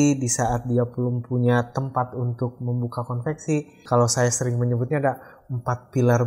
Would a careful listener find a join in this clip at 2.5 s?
no; 1 cut; at 3.8 s

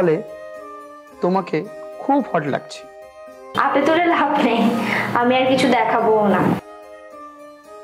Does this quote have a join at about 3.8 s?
no; 1 cut; at 6.6 s

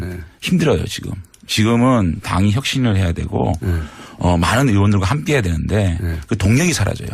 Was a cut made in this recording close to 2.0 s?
yes; 1 cut; at 2.0 s

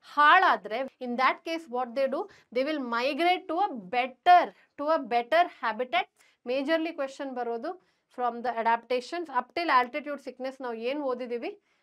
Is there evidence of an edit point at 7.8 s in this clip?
no; 2 cuts; at 0.9 s, 6.1 s

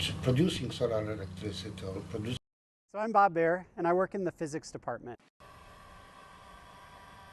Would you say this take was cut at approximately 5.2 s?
yes; 2 cuts; at 2.4 s, 5.2 s

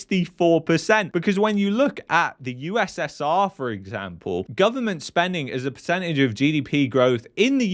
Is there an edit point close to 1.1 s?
yes; 1 cut; at 1.1 s

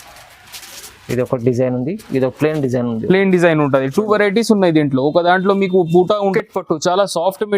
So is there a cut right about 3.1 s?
no; 1 cut; at 6.3 s

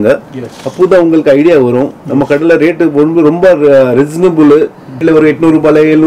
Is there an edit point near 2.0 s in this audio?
no; 1 cut; at 5.0 s

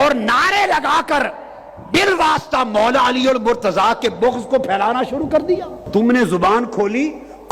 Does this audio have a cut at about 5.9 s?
yes; 1 cut; at 5.9 s

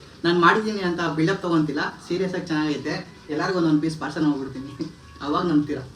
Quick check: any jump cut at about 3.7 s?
no; 0 cuts

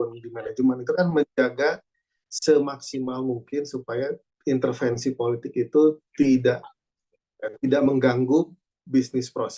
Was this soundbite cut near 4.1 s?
no; 0 cuts

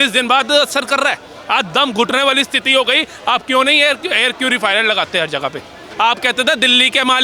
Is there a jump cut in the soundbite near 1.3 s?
no; 1 cut; at 5.9 s

